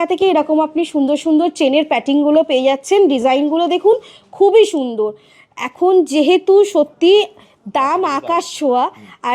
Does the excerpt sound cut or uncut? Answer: uncut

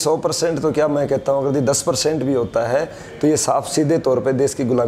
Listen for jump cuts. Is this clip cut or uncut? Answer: uncut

